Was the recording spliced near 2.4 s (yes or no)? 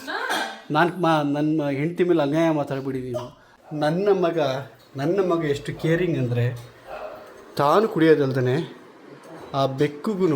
no